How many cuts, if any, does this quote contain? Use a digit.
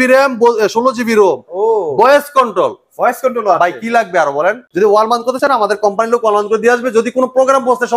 1